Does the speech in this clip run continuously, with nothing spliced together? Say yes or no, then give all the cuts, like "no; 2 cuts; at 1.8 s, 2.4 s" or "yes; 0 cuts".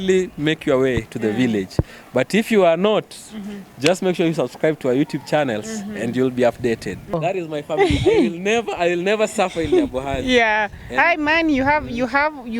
no; 1 cut; at 7.2 s